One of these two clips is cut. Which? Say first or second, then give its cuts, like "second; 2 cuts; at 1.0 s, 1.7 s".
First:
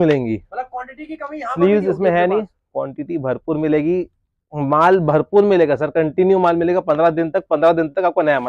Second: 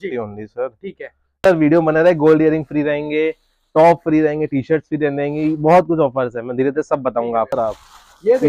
second; 2 cuts; at 1.4 s, 7.5 s